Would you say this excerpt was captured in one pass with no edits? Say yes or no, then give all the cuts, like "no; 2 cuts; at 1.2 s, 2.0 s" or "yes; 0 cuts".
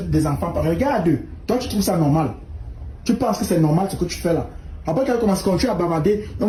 yes; 0 cuts